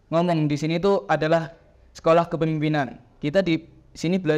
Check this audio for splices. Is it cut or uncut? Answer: uncut